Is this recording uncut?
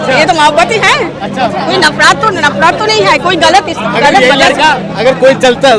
yes; 0 cuts

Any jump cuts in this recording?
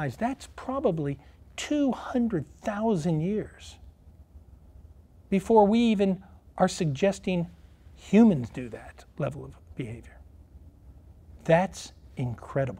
no; 0 cuts

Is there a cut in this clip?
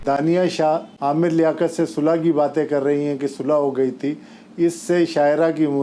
yes; 1 cut; at 0.9 s

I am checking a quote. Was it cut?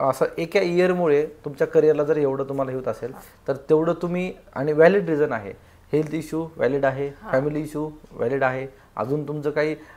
no; 0 cuts

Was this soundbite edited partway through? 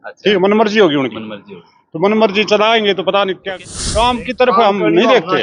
yes; 1 cut; at 3.5 s

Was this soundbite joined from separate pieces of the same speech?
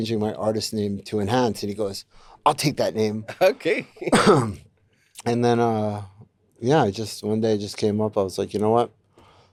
no; 0 cuts

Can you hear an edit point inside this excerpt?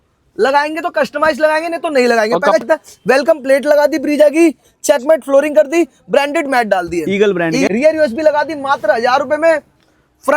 yes; 2 cuts; at 2.6 s, 7.7 s

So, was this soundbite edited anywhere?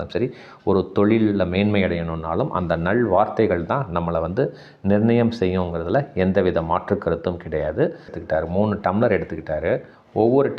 yes; 1 cut; at 8.2 s

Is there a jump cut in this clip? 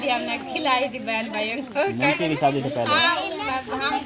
no; 0 cuts

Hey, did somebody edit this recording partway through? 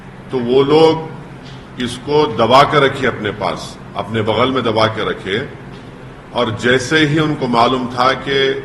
no; 0 cuts

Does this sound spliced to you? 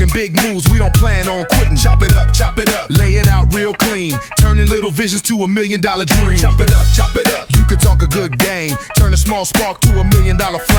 no; 0 cuts

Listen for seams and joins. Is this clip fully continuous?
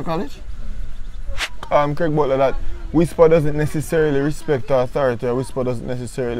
no; 1 cut; at 1.5 s

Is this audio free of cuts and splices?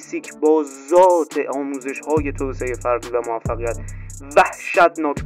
yes; 0 cuts

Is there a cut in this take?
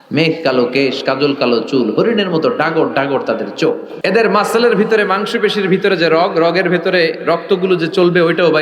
yes; 1 cut; at 3.9 s

